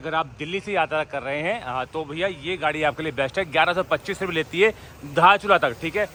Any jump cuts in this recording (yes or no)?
no